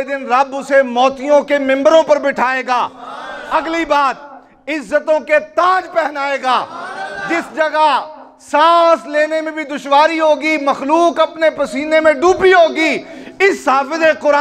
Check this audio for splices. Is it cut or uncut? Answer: uncut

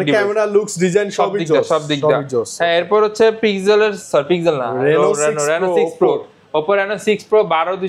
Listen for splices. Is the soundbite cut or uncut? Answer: uncut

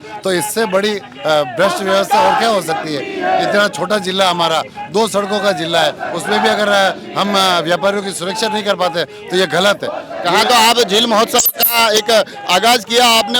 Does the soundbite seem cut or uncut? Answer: uncut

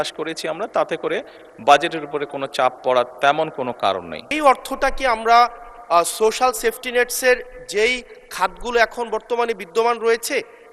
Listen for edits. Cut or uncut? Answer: cut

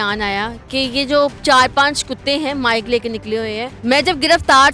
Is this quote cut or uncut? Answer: cut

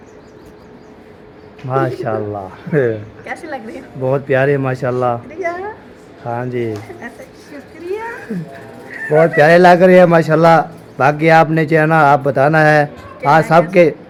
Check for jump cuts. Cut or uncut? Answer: uncut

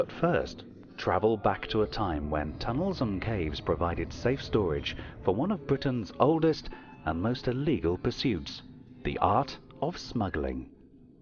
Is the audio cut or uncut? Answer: uncut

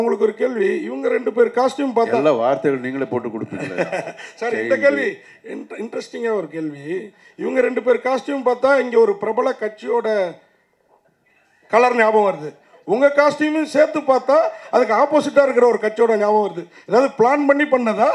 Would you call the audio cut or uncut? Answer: uncut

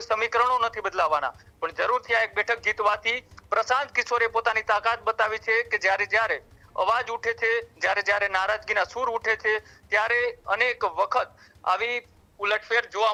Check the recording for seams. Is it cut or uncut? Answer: uncut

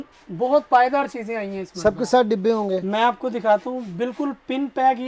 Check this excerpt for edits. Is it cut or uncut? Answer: uncut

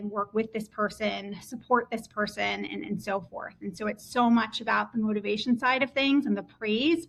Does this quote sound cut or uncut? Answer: uncut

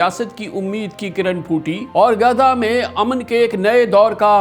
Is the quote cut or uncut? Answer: cut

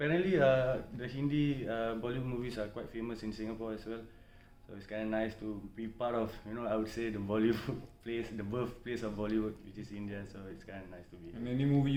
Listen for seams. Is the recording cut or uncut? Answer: uncut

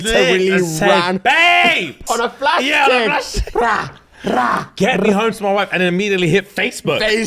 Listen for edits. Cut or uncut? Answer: cut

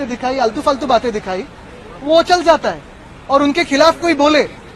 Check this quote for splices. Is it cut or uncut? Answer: uncut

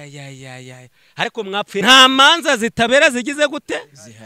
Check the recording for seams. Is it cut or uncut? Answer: cut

